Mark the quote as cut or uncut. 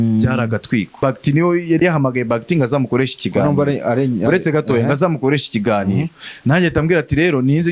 cut